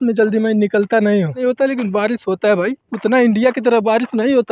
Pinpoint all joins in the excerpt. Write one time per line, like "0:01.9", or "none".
0:01.4

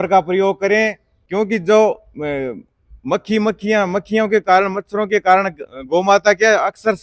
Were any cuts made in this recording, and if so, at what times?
0:01.1

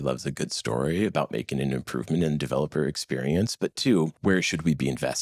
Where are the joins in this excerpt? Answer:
0:04.2

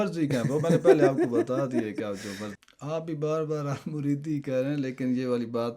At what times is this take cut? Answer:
0:02.5

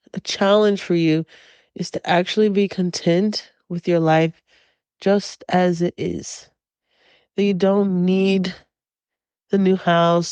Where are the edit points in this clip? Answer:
none

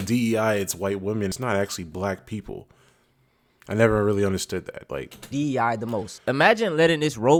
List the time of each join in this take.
none

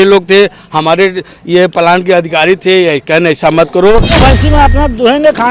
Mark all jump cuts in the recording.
0:04.2

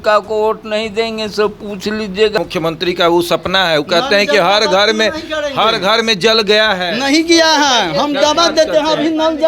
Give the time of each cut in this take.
0:02.3

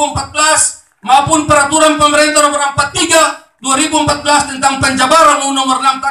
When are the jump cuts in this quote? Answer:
none

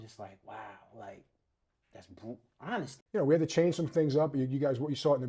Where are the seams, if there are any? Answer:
0:03.0

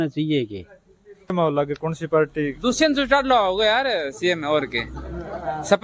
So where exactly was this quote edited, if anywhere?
0:01.3

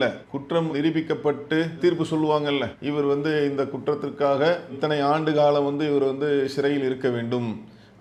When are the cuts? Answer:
none

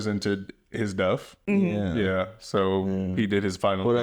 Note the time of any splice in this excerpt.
0:01.4

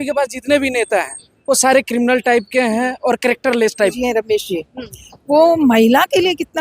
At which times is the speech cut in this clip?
0:04.0

